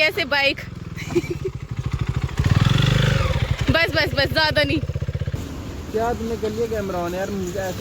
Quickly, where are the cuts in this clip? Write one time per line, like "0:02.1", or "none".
0:05.4

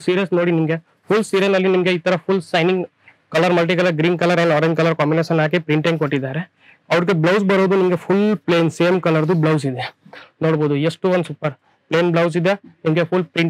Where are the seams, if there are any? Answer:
none

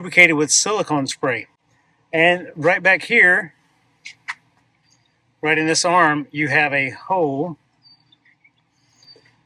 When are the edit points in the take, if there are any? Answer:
none

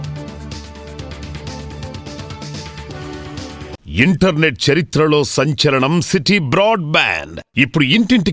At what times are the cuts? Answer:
0:03.7

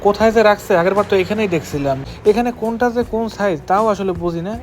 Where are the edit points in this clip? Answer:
0:02.1

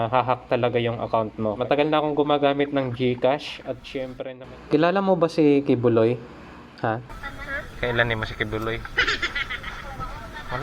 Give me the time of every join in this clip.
0:01.6
0:04.0

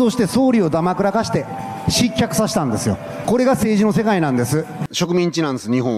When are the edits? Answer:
0:03.1
0:04.8

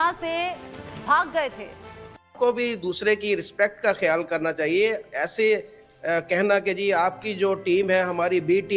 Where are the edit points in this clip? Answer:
0:02.3

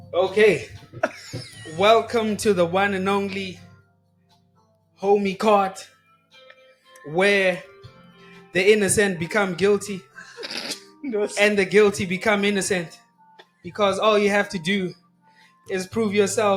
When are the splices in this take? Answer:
none

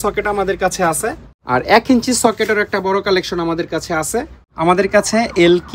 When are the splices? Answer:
0:01.3
0:04.4

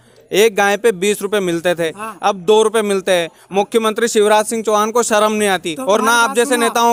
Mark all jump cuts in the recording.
none

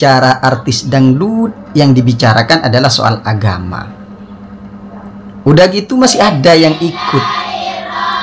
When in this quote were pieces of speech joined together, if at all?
none

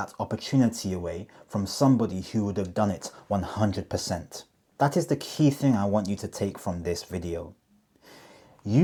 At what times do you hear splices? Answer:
none

